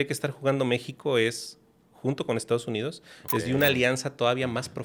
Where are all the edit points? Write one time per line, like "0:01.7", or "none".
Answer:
none

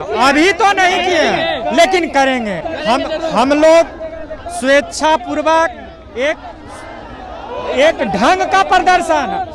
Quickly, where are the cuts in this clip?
none

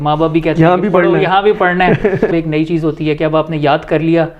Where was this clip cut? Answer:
0:02.3

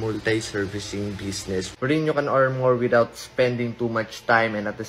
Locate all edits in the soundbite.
none

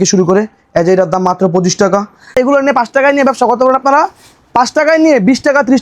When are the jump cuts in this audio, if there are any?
0:02.3

